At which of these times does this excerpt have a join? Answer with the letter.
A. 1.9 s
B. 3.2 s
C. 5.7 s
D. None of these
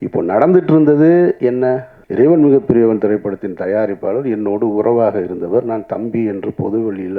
A